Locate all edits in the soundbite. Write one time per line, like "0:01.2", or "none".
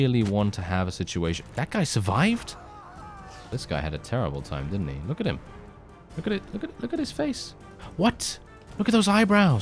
0:03.5